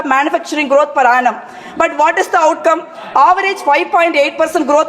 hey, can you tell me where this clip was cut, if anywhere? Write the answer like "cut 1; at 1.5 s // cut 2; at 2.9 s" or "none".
none